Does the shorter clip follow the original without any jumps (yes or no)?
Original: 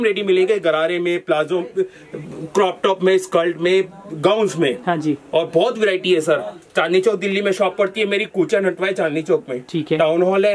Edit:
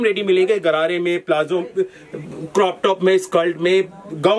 yes